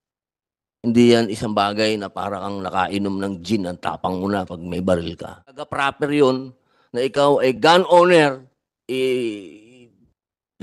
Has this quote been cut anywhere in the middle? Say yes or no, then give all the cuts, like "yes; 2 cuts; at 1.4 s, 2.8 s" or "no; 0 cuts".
yes; 1 cut; at 5.7 s